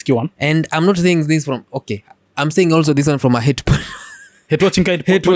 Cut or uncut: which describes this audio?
uncut